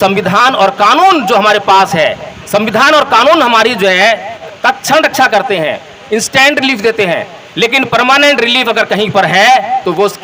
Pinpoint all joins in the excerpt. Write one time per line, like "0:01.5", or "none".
0:04.4